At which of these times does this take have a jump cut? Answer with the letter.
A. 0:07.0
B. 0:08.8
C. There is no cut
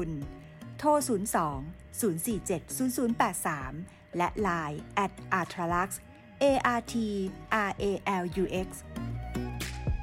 B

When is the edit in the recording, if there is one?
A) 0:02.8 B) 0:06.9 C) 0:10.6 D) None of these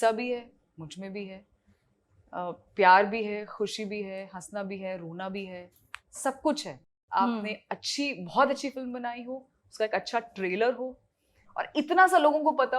B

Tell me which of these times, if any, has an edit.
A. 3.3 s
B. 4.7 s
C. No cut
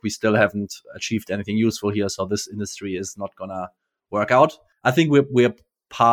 B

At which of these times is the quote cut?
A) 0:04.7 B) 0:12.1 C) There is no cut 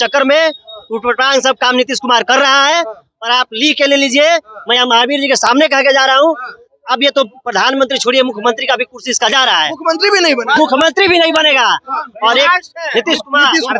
C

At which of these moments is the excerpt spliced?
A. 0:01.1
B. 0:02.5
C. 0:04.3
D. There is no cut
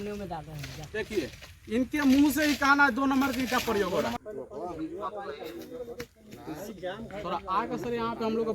C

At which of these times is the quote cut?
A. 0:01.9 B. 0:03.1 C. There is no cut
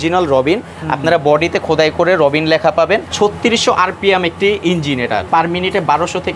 B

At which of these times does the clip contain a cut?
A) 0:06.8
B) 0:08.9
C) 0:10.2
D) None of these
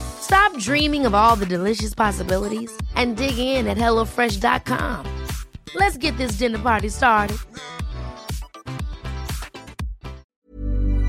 C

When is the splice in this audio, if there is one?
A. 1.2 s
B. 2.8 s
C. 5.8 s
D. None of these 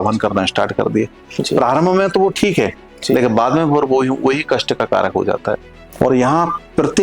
C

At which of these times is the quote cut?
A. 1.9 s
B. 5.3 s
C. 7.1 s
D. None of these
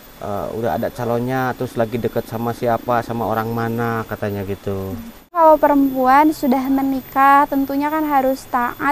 B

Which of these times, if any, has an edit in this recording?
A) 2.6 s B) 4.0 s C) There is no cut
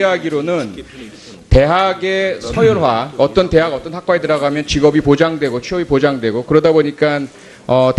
B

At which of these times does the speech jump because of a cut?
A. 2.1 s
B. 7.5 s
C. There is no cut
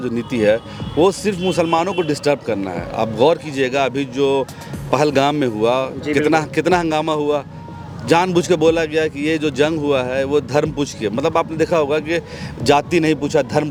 C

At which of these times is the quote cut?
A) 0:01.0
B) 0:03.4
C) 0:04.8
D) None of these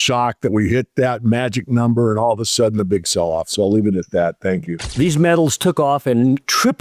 C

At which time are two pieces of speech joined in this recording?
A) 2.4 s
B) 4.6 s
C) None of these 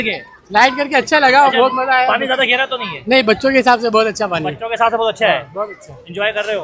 C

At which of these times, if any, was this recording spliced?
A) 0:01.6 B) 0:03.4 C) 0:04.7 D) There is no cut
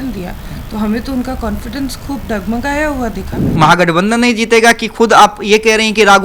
B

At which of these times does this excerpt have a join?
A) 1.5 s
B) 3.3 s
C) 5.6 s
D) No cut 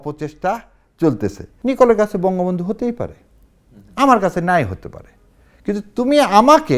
A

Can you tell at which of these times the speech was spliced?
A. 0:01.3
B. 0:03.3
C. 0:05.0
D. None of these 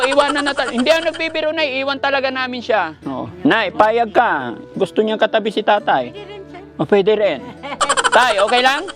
B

